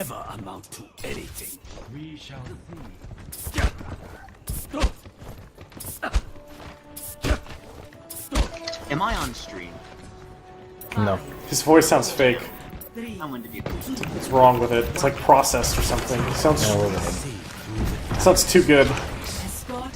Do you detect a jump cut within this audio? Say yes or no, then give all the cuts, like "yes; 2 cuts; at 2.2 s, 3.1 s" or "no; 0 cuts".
yes; 1 cut; at 13.8 s